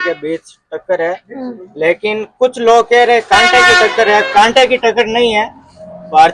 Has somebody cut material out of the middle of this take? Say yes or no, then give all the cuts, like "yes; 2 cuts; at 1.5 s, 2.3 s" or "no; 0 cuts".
no; 0 cuts